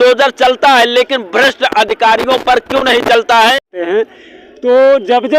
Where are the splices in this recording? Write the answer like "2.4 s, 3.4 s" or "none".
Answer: 3.7 s